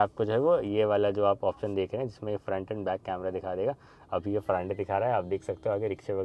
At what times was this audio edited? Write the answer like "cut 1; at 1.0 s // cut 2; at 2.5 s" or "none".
none